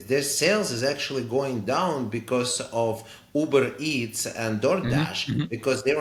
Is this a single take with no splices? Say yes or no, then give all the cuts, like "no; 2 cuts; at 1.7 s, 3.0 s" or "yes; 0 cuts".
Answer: yes; 0 cuts